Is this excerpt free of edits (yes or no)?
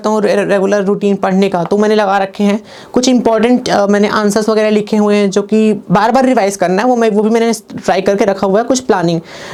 yes